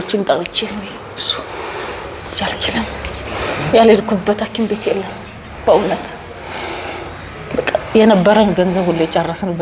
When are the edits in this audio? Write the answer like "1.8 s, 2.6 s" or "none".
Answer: none